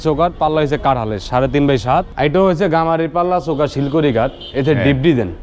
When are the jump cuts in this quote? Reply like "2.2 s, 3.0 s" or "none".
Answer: 2.1 s